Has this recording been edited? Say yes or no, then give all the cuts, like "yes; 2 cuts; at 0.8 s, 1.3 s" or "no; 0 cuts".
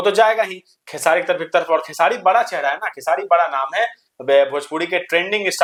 no; 0 cuts